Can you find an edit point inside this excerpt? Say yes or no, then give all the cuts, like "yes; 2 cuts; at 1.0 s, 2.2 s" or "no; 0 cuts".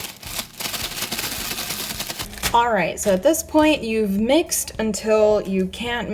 yes; 1 cut; at 2.3 s